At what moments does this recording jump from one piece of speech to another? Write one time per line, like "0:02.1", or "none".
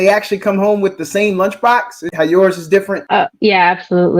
0:02.0
0:03.0